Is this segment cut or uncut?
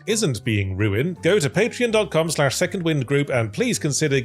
cut